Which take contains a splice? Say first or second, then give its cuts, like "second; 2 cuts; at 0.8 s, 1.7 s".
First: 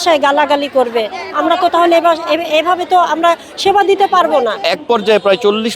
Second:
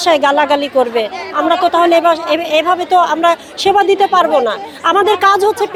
first; 1 cut; at 4.6 s